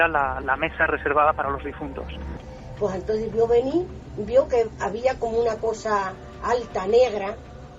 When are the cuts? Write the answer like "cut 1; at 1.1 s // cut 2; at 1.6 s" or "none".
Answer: cut 1; at 2.3 s